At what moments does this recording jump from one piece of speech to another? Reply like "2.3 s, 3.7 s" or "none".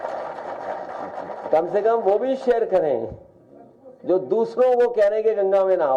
none